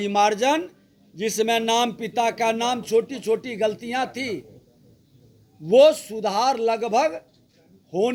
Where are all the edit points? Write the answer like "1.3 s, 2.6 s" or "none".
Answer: none